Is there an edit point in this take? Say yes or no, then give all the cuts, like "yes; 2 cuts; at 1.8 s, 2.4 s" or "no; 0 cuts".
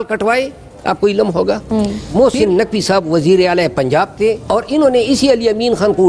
yes; 2 cuts; at 2.0 s, 4.4 s